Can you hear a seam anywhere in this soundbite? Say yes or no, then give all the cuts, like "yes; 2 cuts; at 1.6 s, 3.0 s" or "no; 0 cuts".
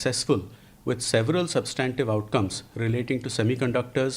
no; 0 cuts